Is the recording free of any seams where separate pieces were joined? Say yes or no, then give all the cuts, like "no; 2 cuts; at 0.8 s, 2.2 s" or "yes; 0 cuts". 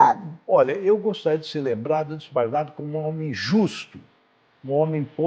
yes; 0 cuts